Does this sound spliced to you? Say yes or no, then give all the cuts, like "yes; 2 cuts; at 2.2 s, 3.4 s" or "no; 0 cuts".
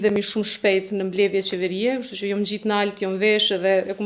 no; 0 cuts